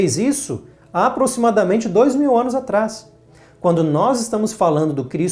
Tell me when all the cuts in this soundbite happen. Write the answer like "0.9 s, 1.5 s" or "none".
none

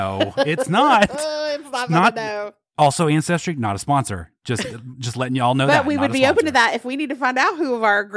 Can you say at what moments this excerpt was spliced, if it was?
none

